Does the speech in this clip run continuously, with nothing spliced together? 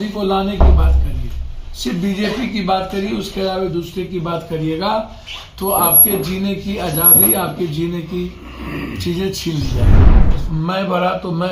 no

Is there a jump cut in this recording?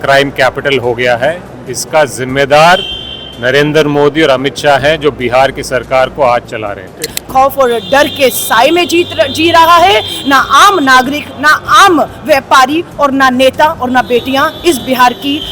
yes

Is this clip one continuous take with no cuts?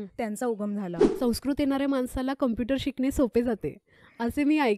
no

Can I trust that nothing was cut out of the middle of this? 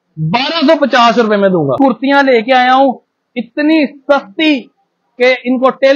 no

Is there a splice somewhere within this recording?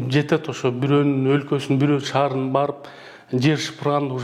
no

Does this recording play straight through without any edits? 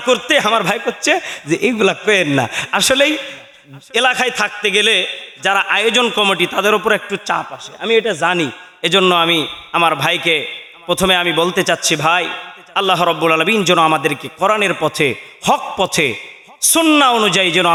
yes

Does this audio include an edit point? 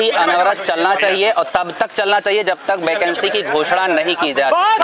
no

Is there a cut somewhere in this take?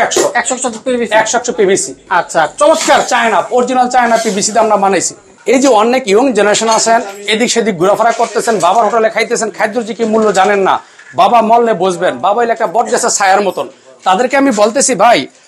no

